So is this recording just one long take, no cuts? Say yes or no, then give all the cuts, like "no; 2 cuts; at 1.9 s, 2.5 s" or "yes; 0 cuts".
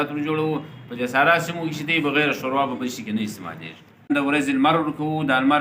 no; 1 cut; at 4.1 s